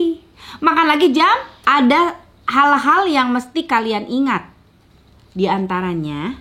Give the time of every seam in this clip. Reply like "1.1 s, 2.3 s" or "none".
1.5 s